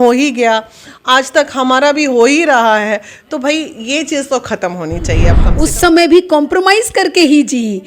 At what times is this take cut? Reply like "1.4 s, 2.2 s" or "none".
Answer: 5.4 s